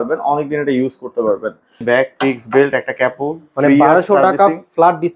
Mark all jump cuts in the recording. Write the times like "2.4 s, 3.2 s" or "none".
1.8 s